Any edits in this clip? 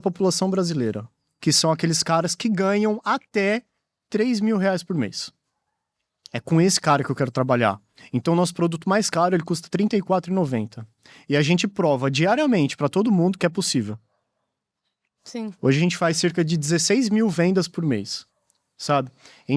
no; 0 cuts

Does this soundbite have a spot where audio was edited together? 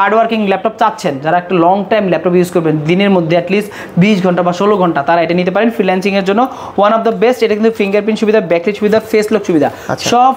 no; 0 cuts

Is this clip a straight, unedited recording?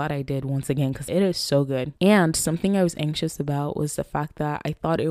no; 2 cuts; at 1.0 s, 1.9 s

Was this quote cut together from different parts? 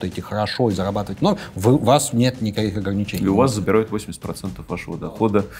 no; 0 cuts

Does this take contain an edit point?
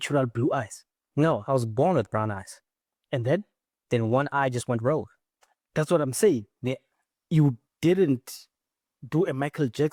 no; 0 cuts

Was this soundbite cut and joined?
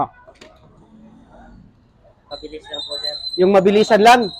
yes; 1 cut; at 2.2 s

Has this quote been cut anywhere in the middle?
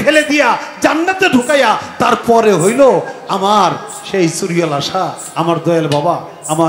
no; 0 cuts

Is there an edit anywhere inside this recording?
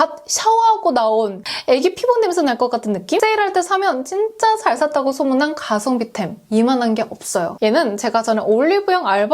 yes; 3 cuts; at 1.5 s, 3.2 s, 7.5 s

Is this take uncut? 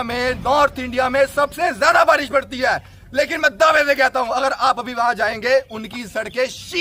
yes; 0 cuts

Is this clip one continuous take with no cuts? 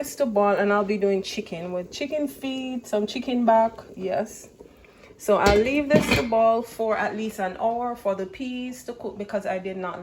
yes; 0 cuts

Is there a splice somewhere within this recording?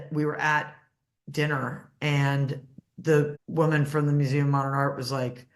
yes; 1 cut; at 3.4 s

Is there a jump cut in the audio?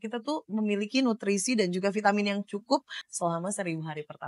yes; 1 cut; at 3.0 s

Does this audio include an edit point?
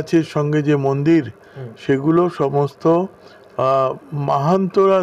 no; 0 cuts

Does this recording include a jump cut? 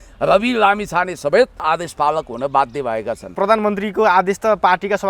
yes; 2 cuts; at 1.6 s, 3.3 s

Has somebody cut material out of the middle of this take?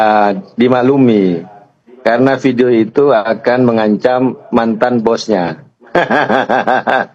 no; 0 cuts

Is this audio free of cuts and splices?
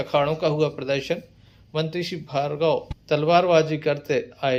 yes; 0 cuts

